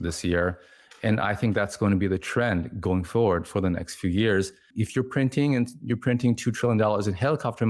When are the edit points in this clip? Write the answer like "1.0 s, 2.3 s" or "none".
4.7 s